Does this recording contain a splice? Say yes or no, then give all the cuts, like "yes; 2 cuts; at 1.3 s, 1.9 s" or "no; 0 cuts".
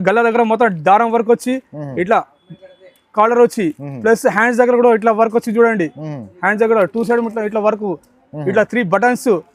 no; 0 cuts